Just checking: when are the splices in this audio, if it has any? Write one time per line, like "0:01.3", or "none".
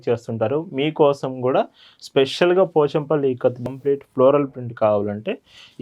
0:03.7

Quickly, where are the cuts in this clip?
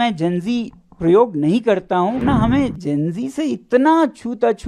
0:02.2

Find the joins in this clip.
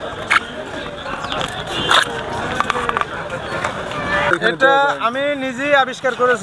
0:01.5
0:04.3

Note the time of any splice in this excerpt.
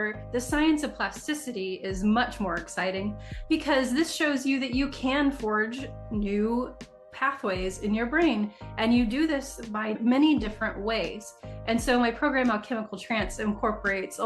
none

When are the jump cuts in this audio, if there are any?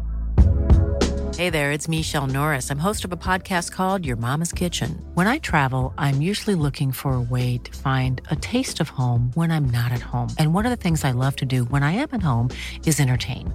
none

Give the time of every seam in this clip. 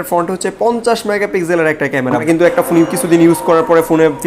0:02.2

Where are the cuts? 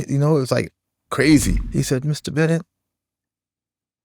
0:01.6

